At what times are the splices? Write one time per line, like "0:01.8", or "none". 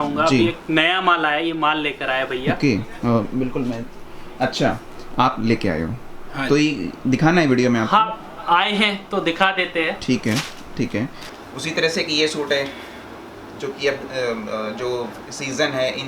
0:11.3